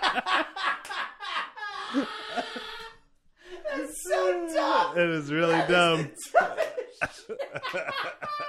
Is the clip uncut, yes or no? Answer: yes